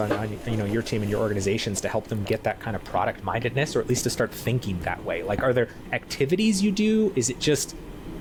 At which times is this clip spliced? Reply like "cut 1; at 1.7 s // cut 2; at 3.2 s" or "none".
none